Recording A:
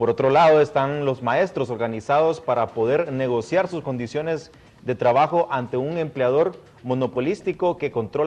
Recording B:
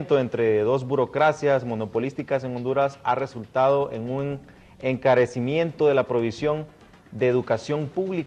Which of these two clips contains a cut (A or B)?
A